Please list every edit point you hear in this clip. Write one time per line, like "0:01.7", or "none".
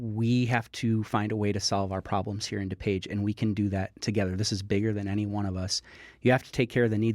0:06.0

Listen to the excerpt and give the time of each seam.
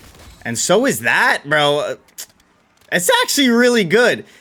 none

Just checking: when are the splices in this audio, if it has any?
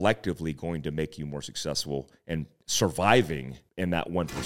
0:02.6
0:03.6

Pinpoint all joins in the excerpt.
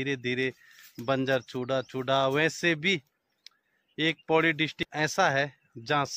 0:04.8

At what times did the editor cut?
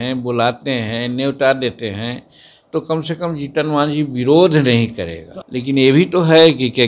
none

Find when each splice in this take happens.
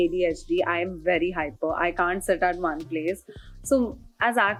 none

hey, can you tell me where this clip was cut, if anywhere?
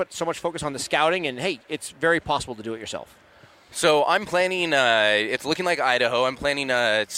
none

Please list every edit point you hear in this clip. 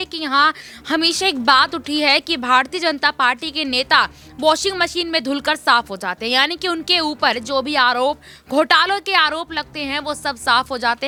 none

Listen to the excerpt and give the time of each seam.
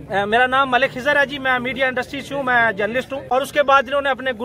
0:03.2

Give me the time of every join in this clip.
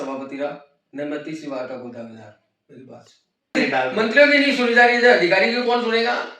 0:03.5

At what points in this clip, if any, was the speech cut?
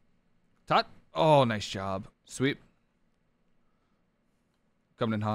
0:02.2

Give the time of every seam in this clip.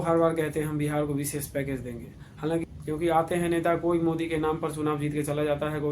0:02.6

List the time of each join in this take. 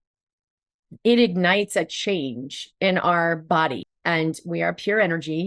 0:03.9

